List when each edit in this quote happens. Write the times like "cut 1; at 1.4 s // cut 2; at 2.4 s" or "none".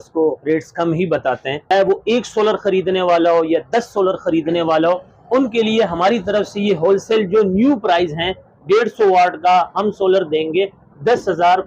cut 1; at 1.6 s